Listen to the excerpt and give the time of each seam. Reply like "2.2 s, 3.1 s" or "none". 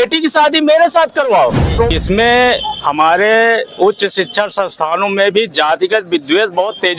1.9 s